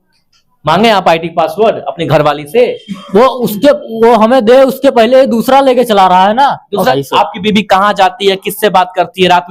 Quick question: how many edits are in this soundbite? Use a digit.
1